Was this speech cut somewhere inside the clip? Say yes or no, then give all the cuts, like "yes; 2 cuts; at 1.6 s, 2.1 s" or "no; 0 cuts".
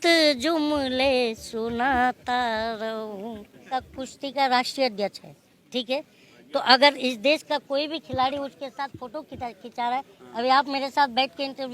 yes; 1 cut; at 3.6 s